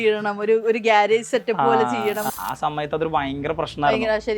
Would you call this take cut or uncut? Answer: cut